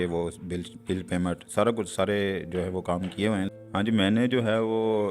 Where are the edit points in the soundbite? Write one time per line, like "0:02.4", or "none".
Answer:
0:03.5